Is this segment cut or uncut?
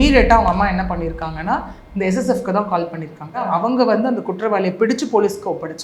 cut